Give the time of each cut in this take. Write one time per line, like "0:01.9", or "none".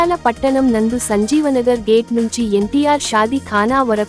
none